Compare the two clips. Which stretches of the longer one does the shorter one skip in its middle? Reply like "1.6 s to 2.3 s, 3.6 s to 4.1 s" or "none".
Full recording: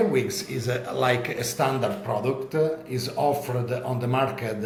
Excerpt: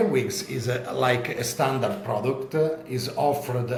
none